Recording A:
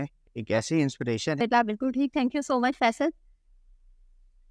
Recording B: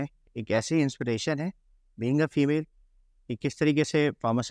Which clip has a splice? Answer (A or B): A